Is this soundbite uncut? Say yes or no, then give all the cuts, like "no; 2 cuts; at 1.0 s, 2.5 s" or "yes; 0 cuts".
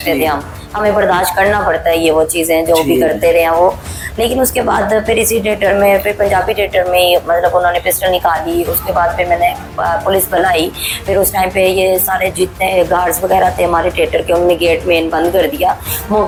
yes; 0 cuts